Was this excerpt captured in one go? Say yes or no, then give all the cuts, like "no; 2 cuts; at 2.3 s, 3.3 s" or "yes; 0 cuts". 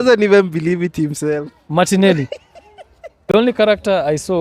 no; 1 cut; at 3.3 s